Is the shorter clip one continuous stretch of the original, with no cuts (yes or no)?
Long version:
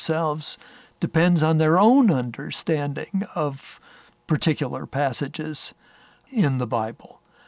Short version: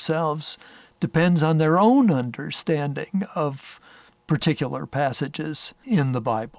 no